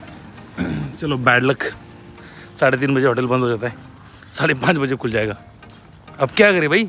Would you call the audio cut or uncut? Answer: uncut